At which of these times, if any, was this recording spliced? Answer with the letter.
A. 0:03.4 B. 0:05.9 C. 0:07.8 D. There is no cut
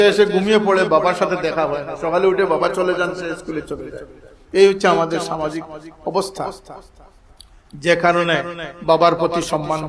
D